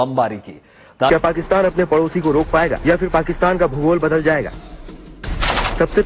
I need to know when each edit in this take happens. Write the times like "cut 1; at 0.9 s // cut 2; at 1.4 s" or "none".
cut 1; at 1.1 s